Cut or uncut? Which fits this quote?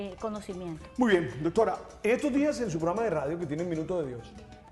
cut